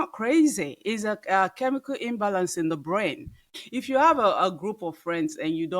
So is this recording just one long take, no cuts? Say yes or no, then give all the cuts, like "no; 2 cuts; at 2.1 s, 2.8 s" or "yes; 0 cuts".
no; 1 cut; at 3.5 s